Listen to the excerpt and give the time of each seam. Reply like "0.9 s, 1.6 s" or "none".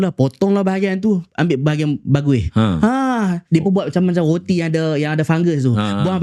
3.4 s